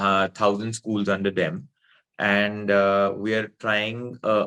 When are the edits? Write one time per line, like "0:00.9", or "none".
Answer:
none